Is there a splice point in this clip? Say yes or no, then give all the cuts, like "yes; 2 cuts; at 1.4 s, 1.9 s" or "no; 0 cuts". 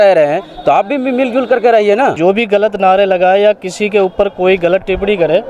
yes; 1 cut; at 2.2 s